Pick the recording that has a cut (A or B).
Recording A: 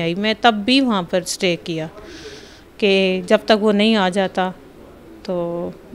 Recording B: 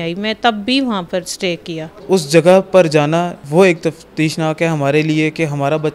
B